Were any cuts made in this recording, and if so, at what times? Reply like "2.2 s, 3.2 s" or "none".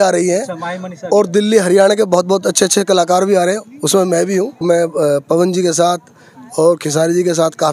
4.6 s